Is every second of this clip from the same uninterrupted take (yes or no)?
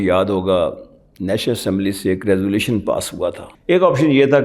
no